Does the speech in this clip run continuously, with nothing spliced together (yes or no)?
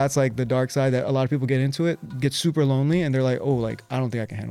yes